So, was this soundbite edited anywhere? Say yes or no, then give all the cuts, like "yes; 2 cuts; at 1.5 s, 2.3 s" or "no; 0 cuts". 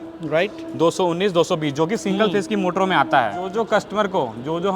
yes; 1 cut; at 3.5 s